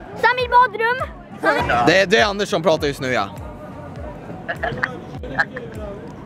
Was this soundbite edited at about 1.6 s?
yes; 1 cut; at 1.6 s

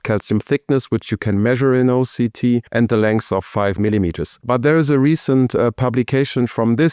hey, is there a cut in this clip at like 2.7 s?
yes; 2 cuts; at 2.7 s, 4.3 s

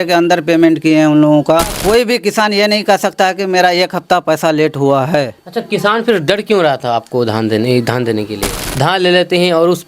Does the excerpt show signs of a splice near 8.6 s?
yes; 2 cuts; at 1.8 s, 8.6 s

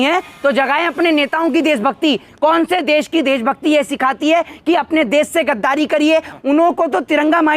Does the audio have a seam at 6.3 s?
yes; 2 cuts; at 2.3 s, 6.3 s

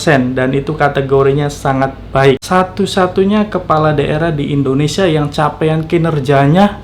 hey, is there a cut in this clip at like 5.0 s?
no; 1 cut; at 2.4 s

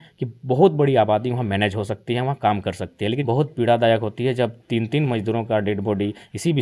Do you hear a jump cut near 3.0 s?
yes; 1 cut; at 3.0 s

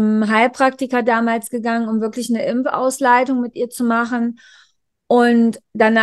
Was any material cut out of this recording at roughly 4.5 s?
no; 0 cuts

